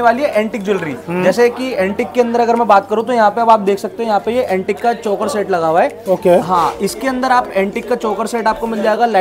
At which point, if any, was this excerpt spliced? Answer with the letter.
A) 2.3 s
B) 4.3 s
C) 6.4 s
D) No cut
D